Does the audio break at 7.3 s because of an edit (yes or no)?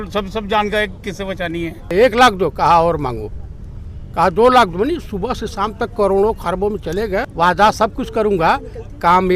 yes